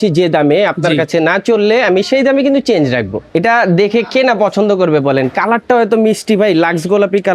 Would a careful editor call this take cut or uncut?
cut